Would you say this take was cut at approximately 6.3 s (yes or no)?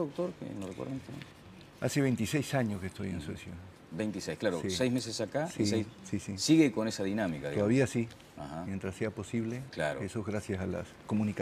yes